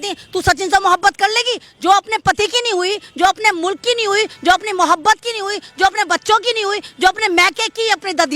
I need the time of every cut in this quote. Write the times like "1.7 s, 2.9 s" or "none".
none